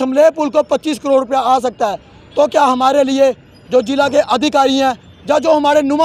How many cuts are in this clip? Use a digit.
0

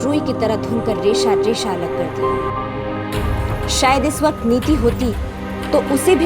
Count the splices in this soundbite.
1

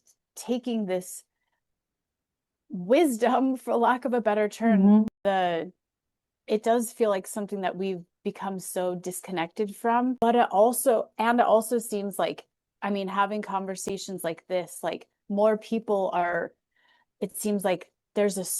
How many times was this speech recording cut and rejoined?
2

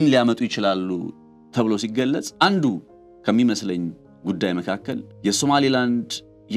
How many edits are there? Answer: 2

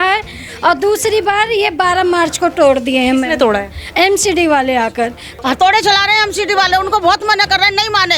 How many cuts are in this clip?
1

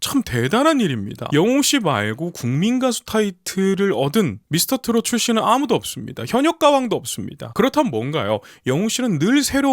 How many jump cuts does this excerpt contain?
1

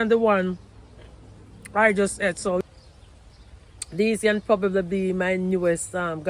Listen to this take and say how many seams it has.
1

